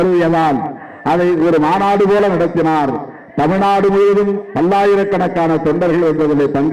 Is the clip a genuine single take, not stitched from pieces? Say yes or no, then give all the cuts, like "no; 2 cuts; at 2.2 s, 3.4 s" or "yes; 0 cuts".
yes; 0 cuts